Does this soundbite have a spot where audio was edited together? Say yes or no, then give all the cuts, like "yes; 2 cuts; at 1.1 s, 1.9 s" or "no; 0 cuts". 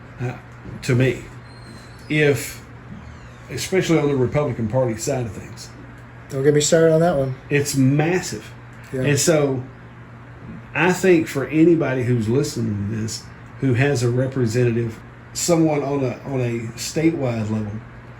yes; 1 cut; at 15.0 s